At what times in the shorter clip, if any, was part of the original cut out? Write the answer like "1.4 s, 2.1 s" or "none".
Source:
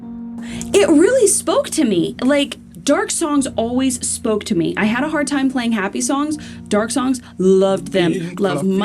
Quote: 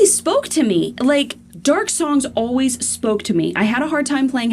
none